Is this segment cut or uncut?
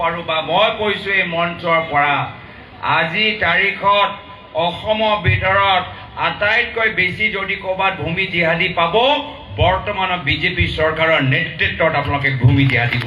uncut